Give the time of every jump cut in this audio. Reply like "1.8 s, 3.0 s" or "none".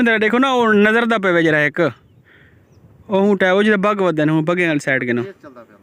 none